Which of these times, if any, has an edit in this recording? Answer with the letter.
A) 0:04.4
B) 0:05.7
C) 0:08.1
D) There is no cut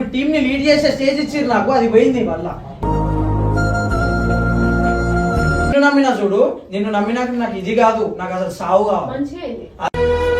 B